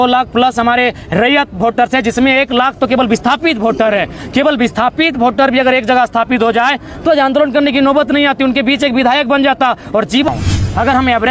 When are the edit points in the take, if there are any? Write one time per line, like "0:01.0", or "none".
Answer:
0:10.3